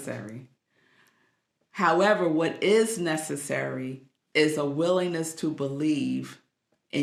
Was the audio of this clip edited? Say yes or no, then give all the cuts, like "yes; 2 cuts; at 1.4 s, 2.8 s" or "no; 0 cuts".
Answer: no; 0 cuts